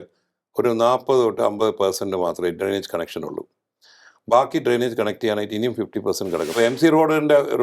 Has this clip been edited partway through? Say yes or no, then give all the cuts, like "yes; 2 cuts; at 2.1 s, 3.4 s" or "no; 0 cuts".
yes; 1 cut; at 6.6 s